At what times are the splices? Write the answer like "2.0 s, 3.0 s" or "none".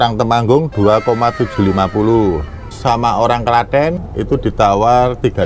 2.7 s, 4.0 s